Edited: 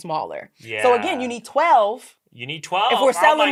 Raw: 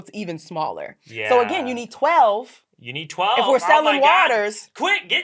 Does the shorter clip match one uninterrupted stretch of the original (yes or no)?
yes